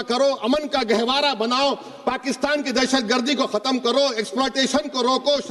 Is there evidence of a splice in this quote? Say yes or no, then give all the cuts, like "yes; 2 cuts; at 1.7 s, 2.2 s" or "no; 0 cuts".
no; 0 cuts